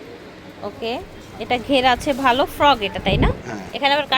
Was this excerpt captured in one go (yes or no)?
no